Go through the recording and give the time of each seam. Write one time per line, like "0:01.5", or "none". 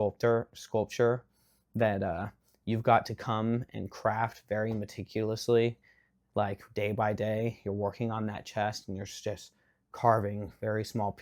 none